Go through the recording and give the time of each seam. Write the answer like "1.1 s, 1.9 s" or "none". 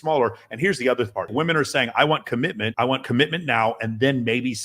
1.3 s, 2.6 s